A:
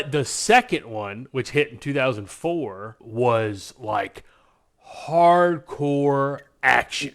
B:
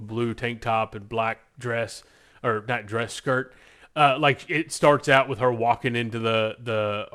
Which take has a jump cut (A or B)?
A